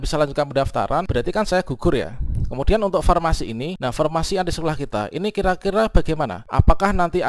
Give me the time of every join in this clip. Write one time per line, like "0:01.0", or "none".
0:01.1
0:03.7
0:06.4

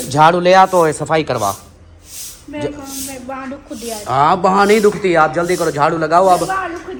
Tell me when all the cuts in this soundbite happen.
none

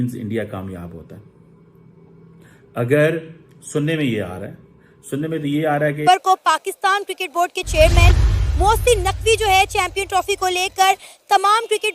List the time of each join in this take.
0:06.0

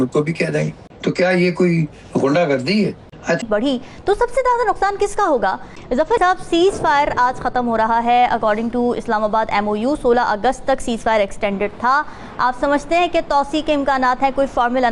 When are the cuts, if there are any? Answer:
0:03.5

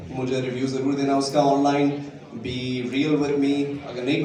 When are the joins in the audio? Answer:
none

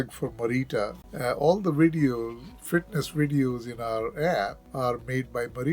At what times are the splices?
0:01.0
0:04.6

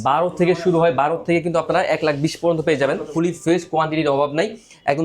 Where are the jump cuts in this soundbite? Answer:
0:03.1

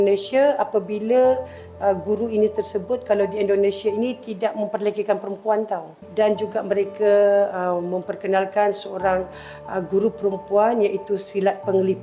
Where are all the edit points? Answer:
0:06.0

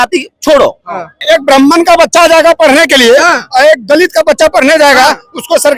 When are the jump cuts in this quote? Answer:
0:01.2

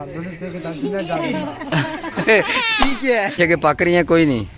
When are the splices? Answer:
0:03.4

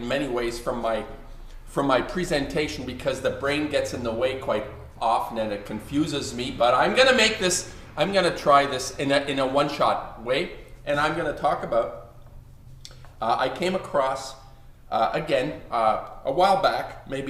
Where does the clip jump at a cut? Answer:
none

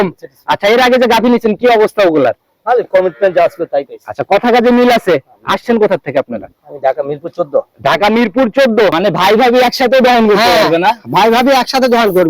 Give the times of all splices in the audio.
0:09.0

